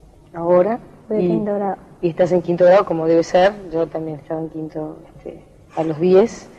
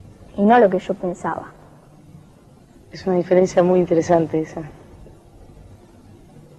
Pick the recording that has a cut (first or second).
second